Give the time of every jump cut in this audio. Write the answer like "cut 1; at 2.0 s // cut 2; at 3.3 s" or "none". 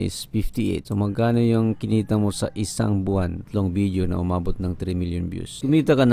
cut 1; at 3.4 s